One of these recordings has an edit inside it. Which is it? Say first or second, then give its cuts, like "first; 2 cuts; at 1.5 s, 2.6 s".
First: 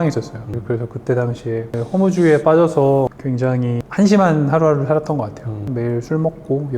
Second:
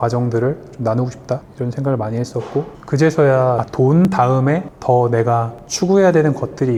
first; 3 cuts; at 1.8 s, 3.6 s, 5.7 s